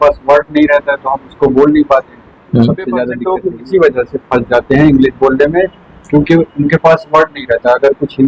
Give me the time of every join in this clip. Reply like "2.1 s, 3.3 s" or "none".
3.2 s